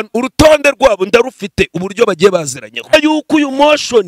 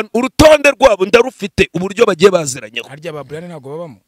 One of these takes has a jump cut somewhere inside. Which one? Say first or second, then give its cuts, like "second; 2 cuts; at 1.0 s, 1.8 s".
first; 1 cut; at 2.9 s